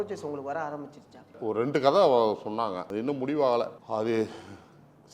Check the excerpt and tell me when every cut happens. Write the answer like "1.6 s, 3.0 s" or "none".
1.4 s, 2.9 s, 3.8 s